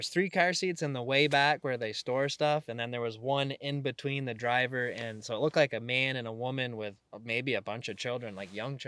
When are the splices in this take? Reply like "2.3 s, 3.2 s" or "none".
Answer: none